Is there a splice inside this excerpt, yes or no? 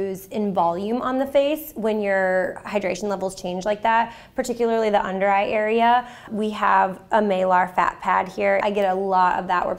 yes